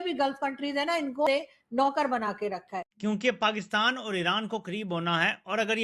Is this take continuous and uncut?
no; 2 cuts; at 1.3 s, 2.9 s

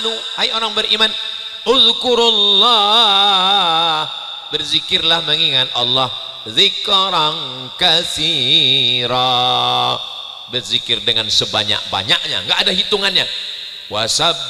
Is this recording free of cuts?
yes; 0 cuts

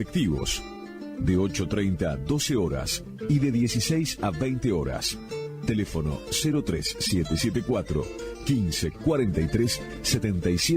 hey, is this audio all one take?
yes; 0 cuts

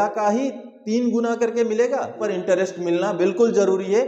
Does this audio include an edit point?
yes; 1 cut; at 2.3 s

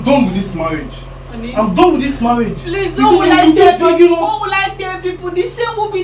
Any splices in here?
no; 0 cuts

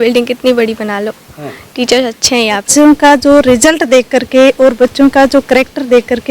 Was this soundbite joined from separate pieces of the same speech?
yes; 1 cut; at 2.7 s

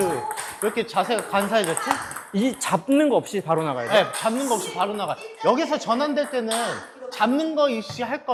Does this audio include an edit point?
no; 0 cuts

